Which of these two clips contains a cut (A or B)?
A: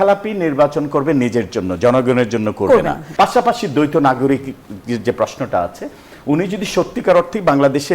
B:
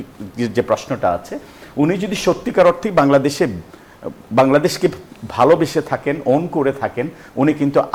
A